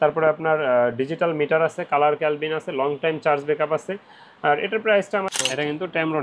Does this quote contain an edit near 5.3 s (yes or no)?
yes